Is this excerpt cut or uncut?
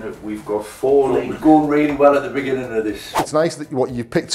cut